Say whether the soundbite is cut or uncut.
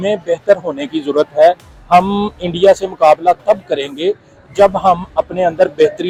uncut